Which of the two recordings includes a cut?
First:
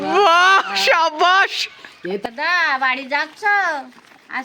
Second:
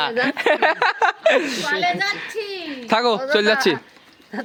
first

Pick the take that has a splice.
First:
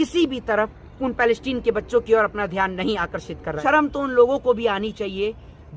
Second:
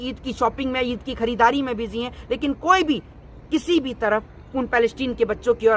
first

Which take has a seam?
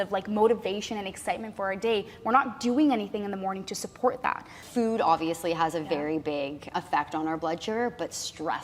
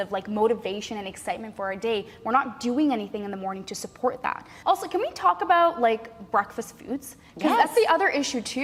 first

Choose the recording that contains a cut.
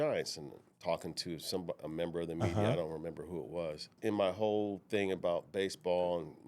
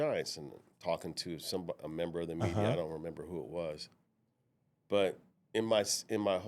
first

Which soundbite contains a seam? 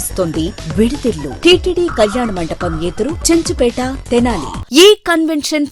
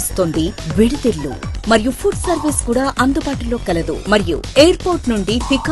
first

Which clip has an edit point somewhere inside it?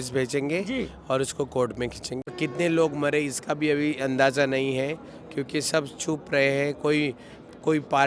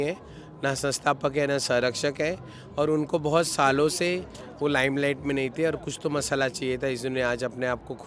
first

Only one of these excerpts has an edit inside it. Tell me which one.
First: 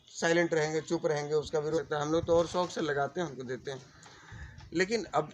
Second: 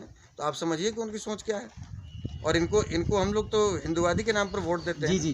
first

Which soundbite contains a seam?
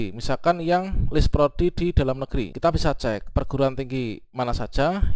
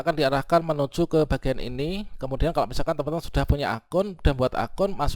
first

